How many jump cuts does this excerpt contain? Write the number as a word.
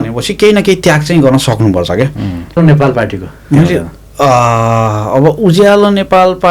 one